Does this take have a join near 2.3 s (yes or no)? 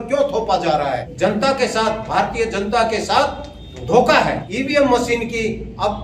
no